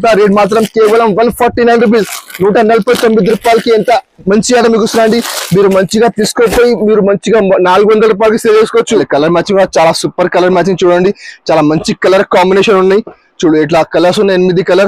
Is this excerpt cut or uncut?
cut